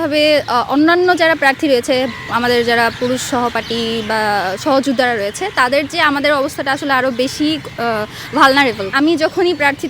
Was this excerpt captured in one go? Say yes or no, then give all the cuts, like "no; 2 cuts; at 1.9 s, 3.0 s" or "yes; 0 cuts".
no; 1 cut; at 8.9 s